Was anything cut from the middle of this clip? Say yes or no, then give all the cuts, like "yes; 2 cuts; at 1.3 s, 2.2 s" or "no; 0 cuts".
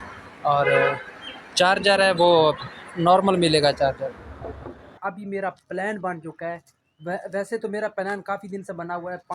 yes; 1 cut; at 5.0 s